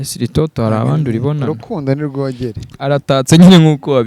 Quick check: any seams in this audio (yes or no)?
yes